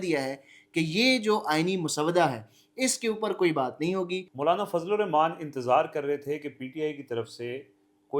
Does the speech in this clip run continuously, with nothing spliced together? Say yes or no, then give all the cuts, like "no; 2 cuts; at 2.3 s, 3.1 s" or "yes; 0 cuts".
no; 1 cut; at 4.3 s